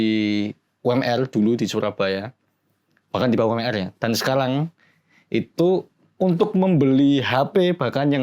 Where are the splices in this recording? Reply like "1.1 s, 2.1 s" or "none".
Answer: none